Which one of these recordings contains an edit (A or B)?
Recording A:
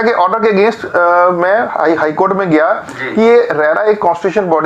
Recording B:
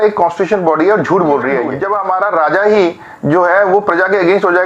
B